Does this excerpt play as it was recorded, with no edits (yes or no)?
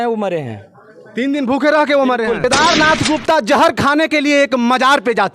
no